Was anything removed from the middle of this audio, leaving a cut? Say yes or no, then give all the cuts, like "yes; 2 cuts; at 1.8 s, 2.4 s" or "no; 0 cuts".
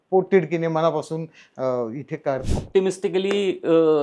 yes; 1 cut; at 2.4 s